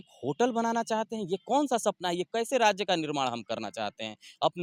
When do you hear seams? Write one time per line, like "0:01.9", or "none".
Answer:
none